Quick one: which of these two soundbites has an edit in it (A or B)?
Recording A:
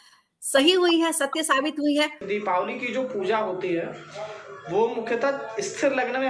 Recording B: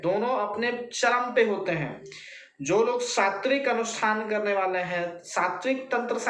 A